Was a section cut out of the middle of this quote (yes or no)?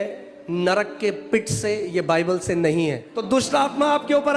yes